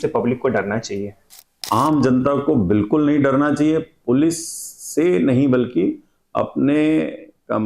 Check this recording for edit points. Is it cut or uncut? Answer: cut